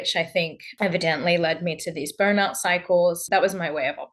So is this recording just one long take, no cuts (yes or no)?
no